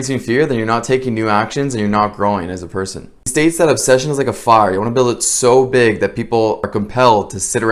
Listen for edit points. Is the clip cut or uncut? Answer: cut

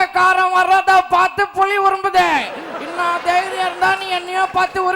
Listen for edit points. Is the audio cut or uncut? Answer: uncut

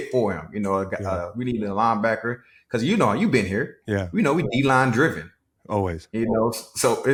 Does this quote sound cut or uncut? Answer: uncut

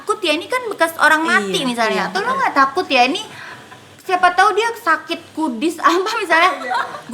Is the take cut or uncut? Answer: uncut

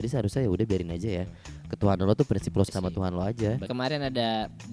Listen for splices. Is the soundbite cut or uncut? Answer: cut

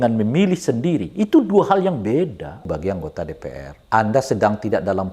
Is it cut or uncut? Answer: cut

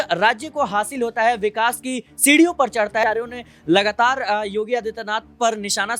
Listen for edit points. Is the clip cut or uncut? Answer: cut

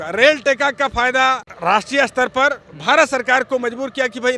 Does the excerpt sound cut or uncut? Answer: uncut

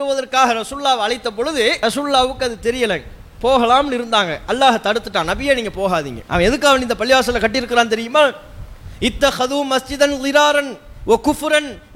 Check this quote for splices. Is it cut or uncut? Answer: cut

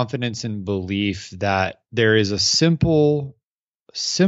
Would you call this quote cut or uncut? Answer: cut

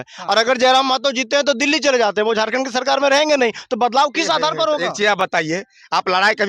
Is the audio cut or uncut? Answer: uncut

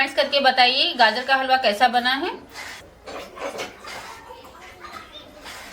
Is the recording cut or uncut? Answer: cut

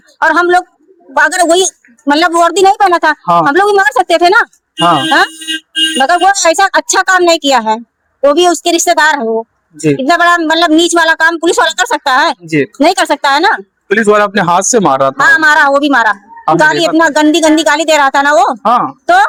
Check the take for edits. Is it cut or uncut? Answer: uncut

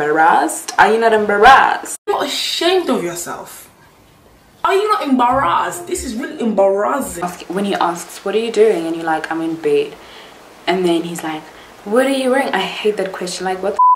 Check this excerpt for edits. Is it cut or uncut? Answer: cut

